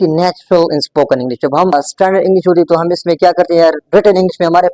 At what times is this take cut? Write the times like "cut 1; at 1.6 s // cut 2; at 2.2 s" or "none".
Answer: cut 1; at 1.7 s